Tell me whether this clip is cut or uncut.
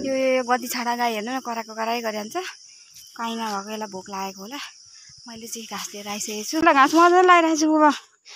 cut